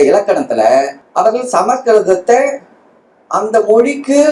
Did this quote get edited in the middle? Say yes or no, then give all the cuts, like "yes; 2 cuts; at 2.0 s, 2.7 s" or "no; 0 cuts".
yes; 1 cut; at 1.0 s